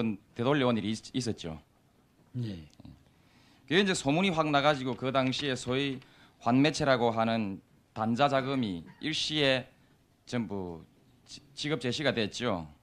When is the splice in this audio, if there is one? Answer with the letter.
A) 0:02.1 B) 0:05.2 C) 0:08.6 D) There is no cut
B